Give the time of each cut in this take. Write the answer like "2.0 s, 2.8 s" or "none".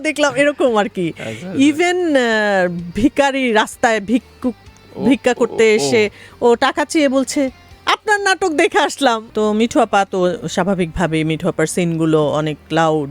9.2 s

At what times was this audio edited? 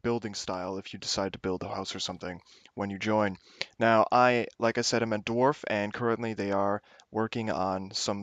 2.1 s

